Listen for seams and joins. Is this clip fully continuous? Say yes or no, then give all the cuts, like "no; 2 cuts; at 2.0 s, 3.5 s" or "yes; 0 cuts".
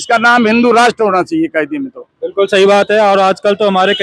yes; 0 cuts